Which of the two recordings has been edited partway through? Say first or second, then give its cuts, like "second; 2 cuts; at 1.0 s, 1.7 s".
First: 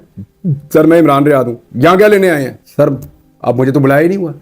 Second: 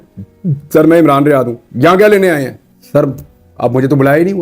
first; 1 cut; at 2.6 s